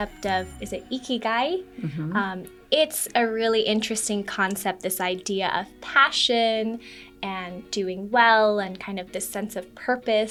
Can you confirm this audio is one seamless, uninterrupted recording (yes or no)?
yes